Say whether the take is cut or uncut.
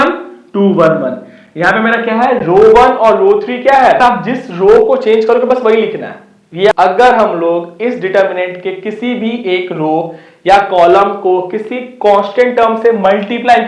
cut